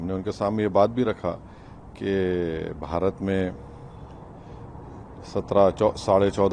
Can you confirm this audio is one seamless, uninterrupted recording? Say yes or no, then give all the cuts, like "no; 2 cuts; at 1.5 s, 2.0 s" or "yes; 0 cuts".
yes; 0 cuts